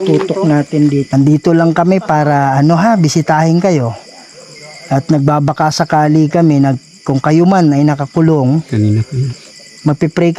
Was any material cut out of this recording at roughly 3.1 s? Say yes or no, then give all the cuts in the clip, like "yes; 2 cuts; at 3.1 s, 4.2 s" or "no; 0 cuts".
no; 1 cut; at 1.1 s